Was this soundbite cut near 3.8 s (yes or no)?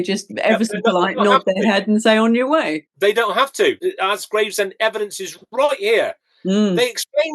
yes